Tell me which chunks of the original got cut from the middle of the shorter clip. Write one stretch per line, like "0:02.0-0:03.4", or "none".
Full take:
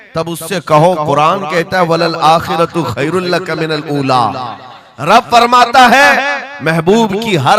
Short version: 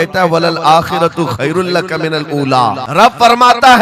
0:04.4-0:04.9